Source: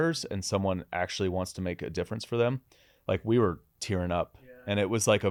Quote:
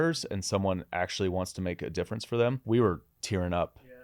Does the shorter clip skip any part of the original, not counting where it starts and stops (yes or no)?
yes